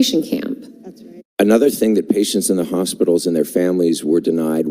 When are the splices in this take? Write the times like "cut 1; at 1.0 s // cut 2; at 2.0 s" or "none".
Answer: cut 1; at 1.2 s

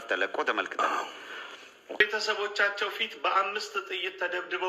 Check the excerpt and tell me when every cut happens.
cut 1; at 2.0 s

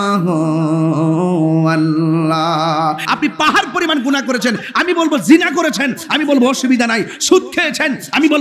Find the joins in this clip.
cut 1; at 3.0 s

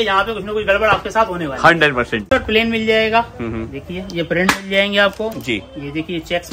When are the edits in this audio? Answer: cut 1; at 2.2 s

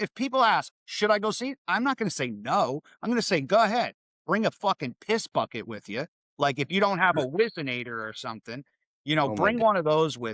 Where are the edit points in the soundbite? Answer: cut 1; at 6.2 s

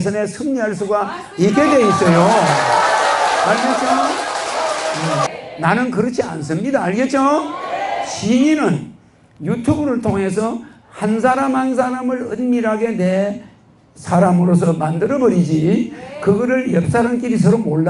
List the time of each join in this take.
cut 1; at 5.3 s

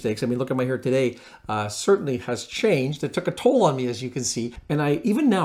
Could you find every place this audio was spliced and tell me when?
cut 1; at 4.5 s

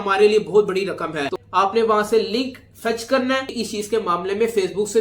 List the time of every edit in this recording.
cut 1; at 1.3 s // cut 2; at 3.6 s

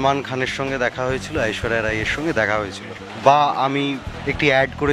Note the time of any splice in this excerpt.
cut 1; at 3.0 s // cut 2; at 4.1 s

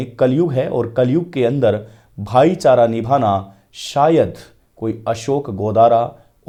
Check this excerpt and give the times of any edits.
none

